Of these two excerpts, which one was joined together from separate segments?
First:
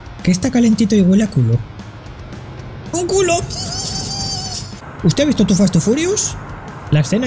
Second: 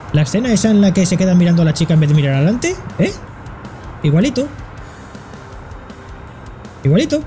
first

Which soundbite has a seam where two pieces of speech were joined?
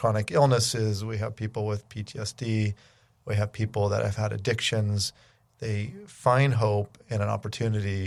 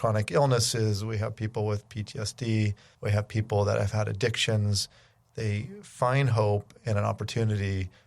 second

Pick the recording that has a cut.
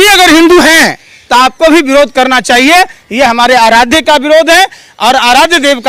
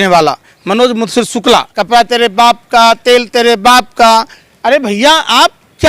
second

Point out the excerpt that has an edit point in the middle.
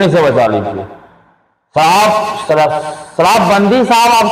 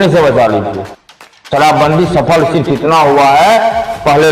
second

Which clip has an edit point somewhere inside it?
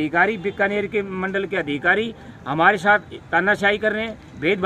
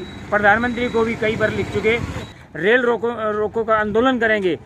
second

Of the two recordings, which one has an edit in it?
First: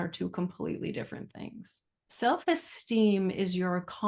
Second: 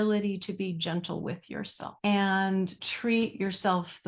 second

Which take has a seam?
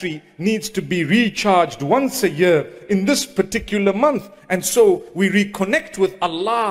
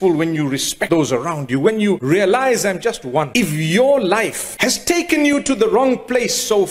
second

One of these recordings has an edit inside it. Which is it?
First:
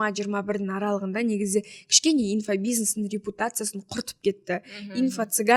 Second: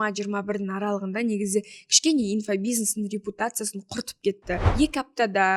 second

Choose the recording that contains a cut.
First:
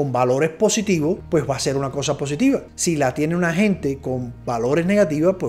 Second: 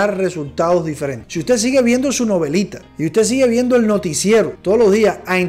second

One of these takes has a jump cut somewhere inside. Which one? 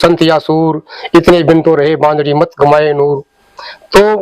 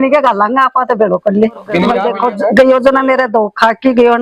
second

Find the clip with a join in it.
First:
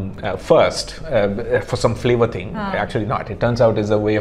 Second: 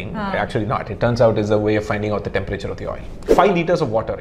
second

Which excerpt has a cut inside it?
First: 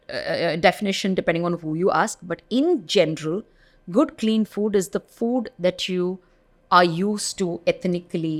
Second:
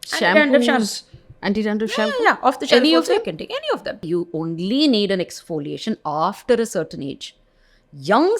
second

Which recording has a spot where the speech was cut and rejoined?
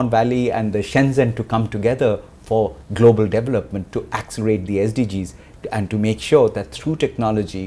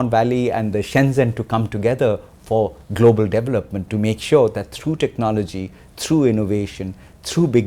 second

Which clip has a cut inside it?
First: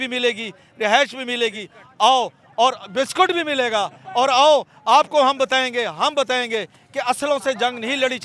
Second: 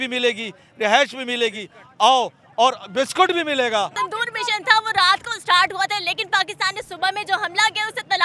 second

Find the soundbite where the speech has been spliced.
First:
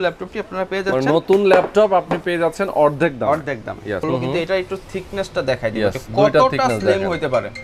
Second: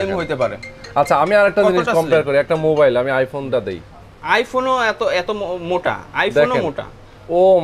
first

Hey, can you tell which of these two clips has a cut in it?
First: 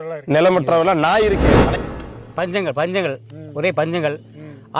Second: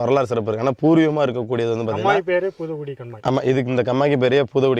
first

